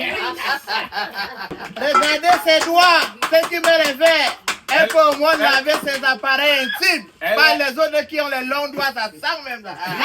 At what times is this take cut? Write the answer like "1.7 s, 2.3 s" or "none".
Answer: 1.7 s